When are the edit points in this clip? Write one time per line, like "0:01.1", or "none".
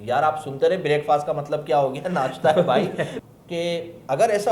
0:03.2